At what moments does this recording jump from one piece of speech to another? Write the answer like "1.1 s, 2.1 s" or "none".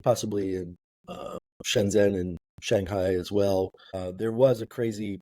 3.9 s